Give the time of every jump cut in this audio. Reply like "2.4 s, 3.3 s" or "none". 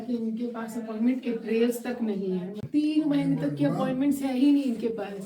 2.7 s